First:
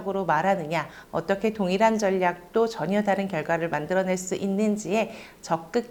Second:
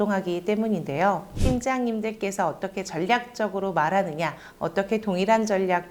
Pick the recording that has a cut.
second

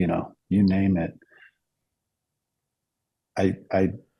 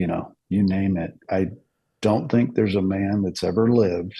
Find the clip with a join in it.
second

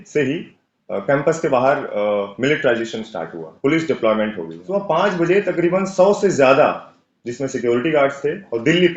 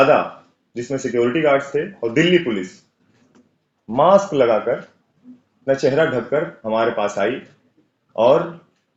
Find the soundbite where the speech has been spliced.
first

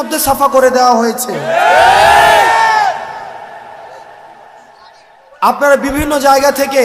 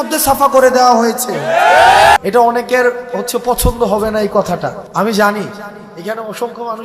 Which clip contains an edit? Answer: second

